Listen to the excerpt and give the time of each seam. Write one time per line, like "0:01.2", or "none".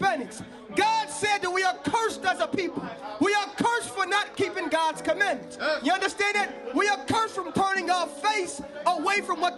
none